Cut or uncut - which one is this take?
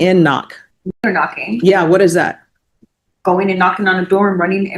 cut